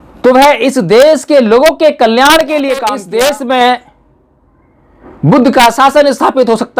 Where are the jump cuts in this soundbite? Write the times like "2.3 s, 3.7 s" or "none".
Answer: 3.0 s